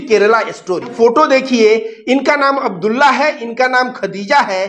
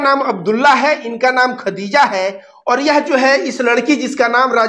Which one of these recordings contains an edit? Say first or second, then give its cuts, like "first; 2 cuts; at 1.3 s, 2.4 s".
first; 1 cut; at 0.9 s